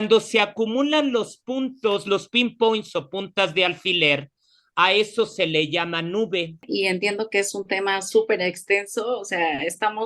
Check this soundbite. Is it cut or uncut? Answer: cut